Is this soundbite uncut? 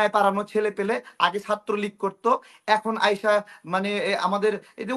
yes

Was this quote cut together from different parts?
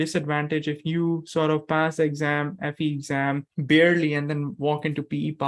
yes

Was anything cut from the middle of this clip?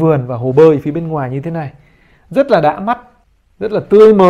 no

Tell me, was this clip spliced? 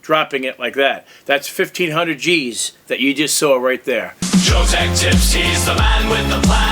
yes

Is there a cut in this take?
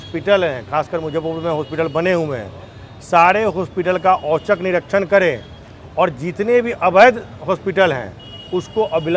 no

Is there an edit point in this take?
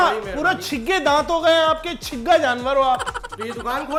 no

